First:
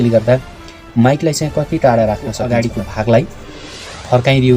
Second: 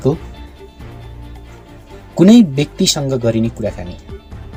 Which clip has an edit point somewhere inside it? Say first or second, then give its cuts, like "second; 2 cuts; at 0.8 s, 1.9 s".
first; 1 cut; at 2.4 s